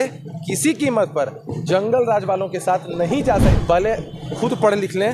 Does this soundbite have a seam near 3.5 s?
yes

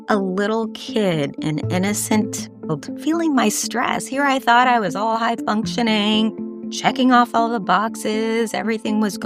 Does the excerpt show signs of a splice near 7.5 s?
no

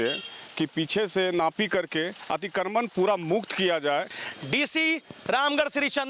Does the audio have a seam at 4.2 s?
yes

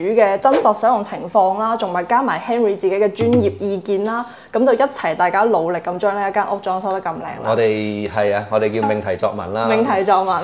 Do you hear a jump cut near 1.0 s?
no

